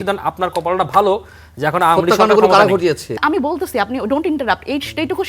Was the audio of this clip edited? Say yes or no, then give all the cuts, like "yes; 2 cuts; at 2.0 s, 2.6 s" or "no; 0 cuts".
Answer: yes; 1 cut; at 3.2 s